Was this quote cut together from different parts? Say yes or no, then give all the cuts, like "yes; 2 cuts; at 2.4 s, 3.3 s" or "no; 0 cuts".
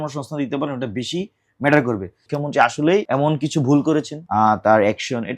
yes; 3 cuts; at 2.2 s, 3.1 s, 4.2 s